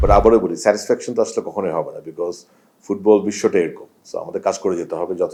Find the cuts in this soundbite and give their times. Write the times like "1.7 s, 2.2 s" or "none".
none